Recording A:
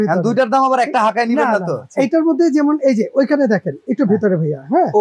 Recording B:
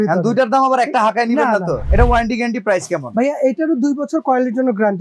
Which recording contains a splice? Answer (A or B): B